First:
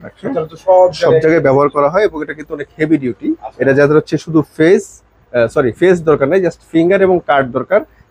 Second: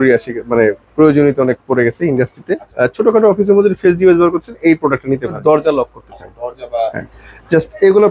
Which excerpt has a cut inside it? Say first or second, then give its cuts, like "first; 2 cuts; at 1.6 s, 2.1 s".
second; 2 cuts; at 2.6 s, 5.4 s